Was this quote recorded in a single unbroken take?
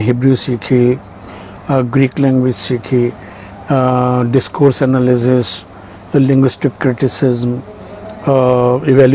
yes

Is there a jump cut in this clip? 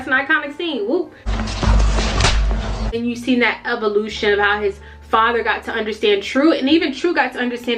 yes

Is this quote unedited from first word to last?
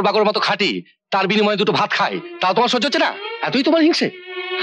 yes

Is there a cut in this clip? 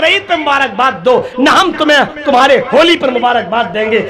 no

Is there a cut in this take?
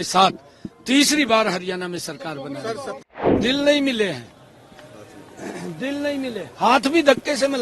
yes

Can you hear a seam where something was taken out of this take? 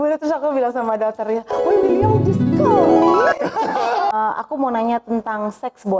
yes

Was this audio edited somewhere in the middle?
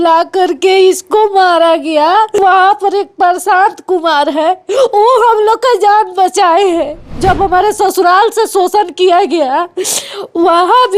yes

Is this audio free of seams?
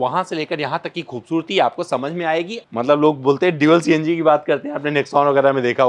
no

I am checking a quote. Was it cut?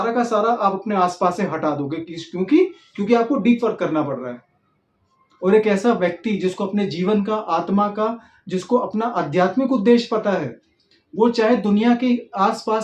no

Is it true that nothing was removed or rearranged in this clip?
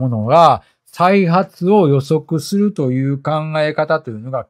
yes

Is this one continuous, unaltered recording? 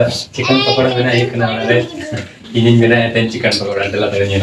yes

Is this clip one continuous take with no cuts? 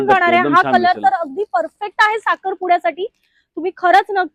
yes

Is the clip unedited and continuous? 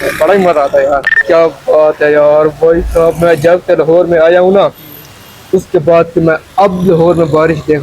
no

